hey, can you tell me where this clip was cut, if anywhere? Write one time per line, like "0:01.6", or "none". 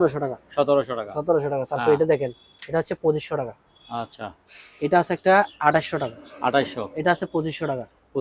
none